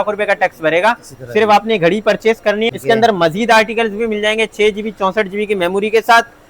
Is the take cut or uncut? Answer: cut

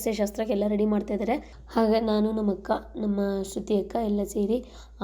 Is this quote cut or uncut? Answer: cut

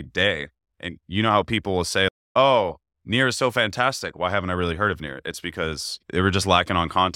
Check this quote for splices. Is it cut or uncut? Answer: cut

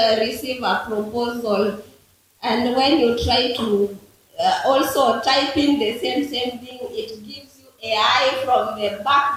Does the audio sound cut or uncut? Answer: uncut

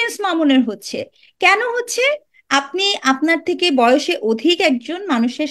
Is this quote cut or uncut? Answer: uncut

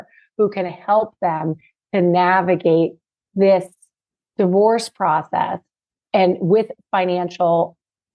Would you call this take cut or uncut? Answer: uncut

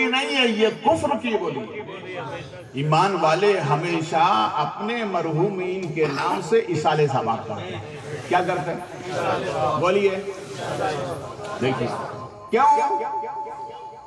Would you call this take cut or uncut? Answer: cut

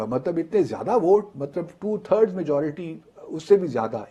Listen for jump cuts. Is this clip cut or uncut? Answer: uncut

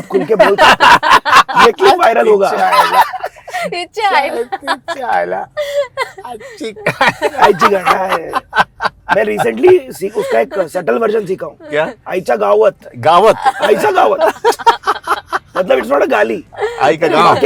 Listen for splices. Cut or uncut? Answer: uncut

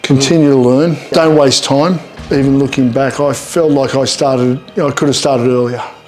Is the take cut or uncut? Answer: cut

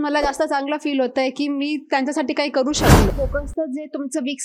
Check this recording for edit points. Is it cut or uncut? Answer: cut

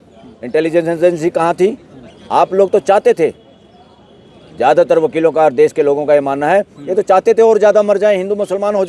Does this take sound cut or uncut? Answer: uncut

